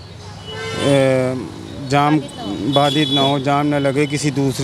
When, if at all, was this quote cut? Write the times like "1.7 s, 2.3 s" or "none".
none